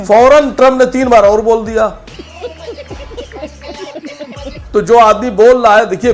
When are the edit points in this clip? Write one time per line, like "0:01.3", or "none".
none